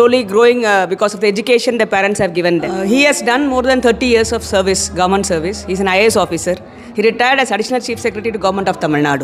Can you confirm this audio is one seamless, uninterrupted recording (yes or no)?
no